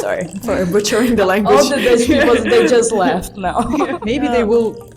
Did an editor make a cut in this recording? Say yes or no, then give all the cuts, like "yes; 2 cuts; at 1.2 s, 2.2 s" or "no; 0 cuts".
yes; 1 cut; at 3.9 s